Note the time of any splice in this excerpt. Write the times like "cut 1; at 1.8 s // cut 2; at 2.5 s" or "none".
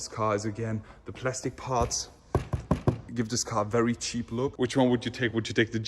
cut 1; at 3.0 s // cut 2; at 4.5 s

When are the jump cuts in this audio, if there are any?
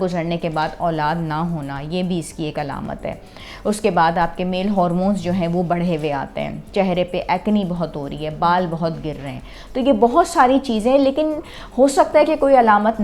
none

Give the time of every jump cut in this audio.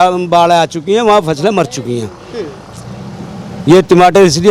none

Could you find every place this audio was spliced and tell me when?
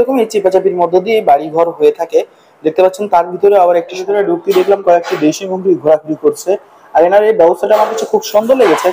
cut 1; at 4.0 s

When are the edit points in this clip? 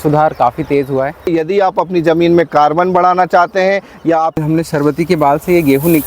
cut 1; at 1.3 s // cut 2; at 4.4 s

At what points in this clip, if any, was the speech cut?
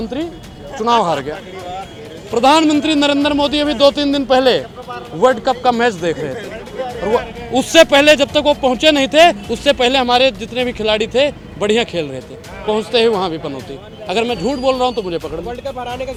none

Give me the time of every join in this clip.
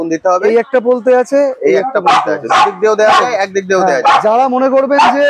none

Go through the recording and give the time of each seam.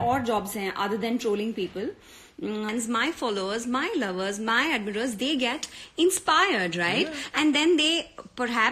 cut 1; at 2.7 s

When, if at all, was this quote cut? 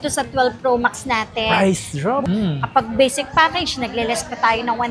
cut 1; at 2.2 s

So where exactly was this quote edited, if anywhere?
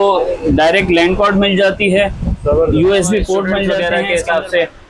cut 1; at 3.7 s

